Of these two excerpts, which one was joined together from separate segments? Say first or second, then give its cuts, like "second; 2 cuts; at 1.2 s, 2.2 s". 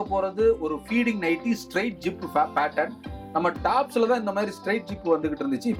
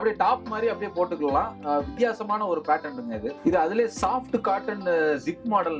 second; 1 cut; at 3.3 s